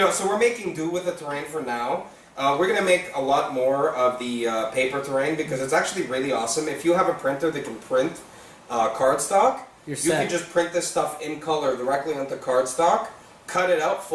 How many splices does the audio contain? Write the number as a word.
one